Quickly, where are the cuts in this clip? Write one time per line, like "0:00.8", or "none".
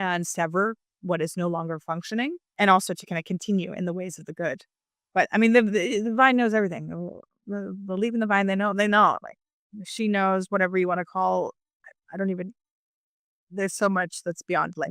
0:01.0
0:02.5